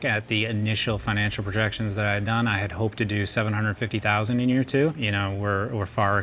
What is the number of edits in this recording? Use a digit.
1